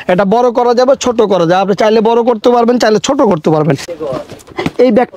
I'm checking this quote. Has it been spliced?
no; 0 cuts

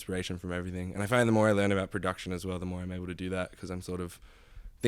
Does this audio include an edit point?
no; 0 cuts

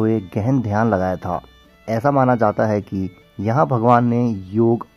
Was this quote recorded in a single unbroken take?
yes; 0 cuts

